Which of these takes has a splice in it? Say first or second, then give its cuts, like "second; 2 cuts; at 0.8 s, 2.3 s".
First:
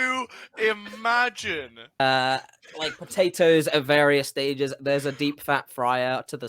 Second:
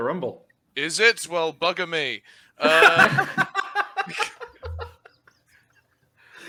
first; 1 cut; at 2.0 s